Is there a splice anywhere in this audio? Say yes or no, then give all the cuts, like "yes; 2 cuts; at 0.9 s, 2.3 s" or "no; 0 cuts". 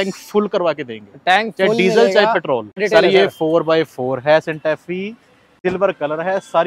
yes; 2 cuts; at 2.8 s, 5.4 s